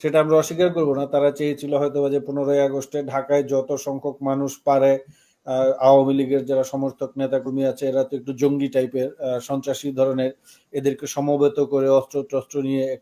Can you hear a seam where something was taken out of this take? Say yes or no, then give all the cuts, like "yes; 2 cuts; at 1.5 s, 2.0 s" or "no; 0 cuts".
no; 0 cuts